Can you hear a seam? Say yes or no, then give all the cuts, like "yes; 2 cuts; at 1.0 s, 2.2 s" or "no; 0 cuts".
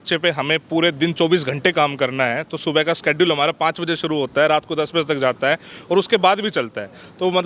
no; 0 cuts